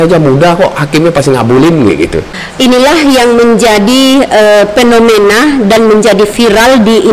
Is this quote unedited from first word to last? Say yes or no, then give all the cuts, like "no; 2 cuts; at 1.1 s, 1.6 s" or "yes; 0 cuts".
no; 1 cut; at 2.3 s